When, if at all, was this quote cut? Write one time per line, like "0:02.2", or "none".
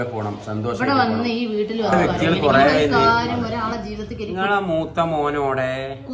0:02.1